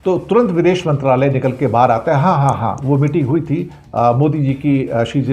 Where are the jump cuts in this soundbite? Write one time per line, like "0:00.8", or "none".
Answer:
none